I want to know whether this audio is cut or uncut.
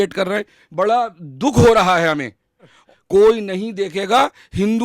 cut